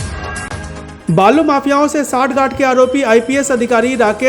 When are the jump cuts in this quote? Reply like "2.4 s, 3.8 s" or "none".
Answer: none